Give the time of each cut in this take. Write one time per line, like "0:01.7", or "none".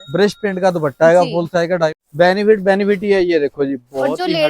0:02.0